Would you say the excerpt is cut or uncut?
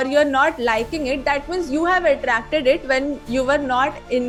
uncut